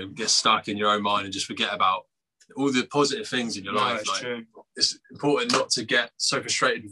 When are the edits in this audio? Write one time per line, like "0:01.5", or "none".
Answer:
0:04.2